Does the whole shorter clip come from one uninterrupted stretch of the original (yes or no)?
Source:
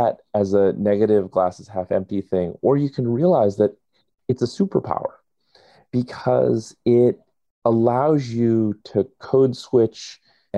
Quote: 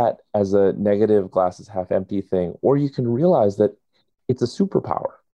yes